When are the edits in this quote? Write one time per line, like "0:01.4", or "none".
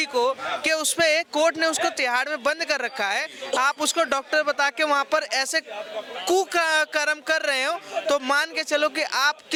none

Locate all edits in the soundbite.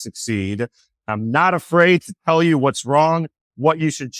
0:01.1

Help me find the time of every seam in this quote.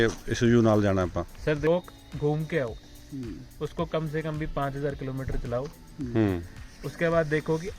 0:01.7

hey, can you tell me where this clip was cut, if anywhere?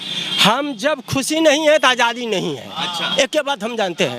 none

